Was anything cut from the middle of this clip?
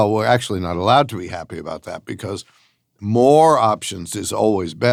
no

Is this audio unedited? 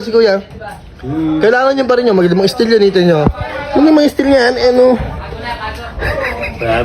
yes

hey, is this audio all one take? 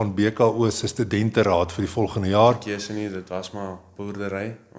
no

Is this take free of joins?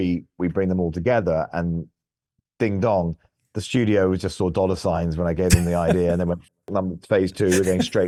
yes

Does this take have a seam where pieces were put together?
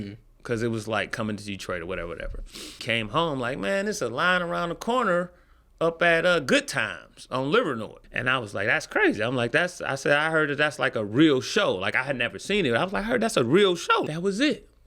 yes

